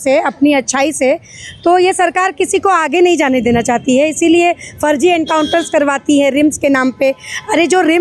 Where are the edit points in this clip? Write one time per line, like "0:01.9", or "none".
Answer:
none